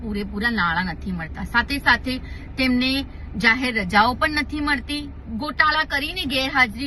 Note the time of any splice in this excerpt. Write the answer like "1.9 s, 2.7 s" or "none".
5.2 s